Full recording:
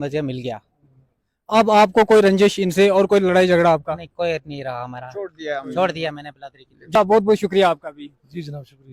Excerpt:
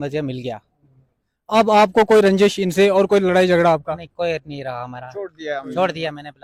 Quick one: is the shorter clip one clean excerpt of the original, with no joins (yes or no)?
yes